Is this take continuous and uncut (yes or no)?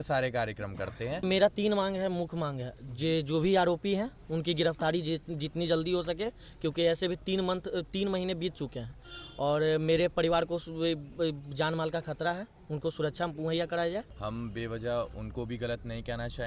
no